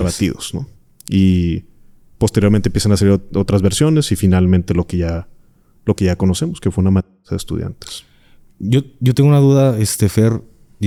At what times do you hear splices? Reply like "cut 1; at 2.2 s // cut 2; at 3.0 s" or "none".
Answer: none